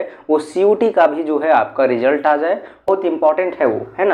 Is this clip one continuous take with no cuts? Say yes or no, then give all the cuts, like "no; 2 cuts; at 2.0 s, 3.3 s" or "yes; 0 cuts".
no; 1 cut; at 2.9 s